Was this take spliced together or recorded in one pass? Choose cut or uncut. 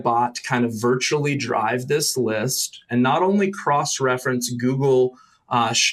uncut